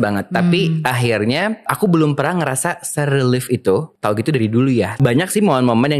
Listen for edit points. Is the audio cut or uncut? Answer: cut